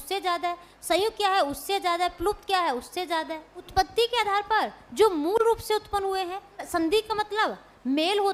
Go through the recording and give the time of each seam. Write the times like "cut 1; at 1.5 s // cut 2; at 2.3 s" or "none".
none